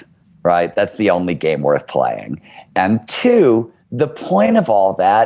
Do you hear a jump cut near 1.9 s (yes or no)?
no